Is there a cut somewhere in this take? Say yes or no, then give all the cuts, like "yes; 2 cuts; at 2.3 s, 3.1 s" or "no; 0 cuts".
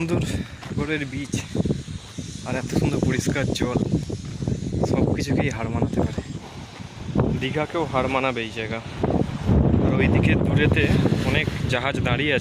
yes; 3 cuts; at 0.8 s, 6.4 s, 9.5 s